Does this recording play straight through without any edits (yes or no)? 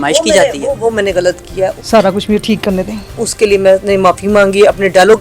no